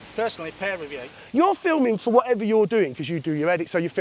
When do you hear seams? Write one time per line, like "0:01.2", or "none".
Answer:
0:01.1